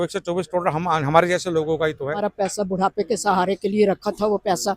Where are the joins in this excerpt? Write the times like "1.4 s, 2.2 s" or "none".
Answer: 2.3 s